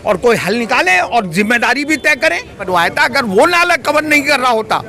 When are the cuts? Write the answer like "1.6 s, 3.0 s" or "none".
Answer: 2.6 s